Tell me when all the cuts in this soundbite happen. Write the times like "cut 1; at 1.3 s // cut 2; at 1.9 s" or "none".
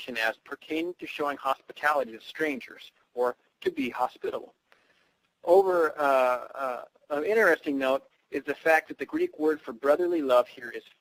none